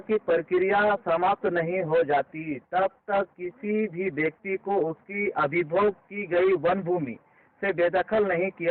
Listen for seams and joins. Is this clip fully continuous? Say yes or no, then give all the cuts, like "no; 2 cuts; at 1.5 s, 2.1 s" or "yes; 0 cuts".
yes; 0 cuts